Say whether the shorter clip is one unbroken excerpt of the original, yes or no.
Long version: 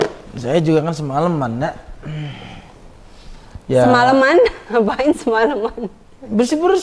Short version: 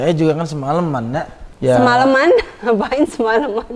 no